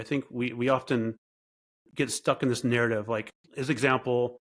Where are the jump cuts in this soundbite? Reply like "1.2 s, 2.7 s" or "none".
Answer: 3.4 s